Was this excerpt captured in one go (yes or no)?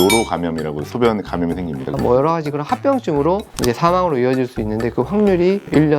no